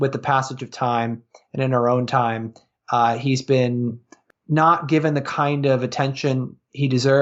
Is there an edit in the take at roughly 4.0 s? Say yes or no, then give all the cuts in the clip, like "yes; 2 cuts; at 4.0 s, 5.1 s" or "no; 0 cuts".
yes; 1 cut; at 4.0 s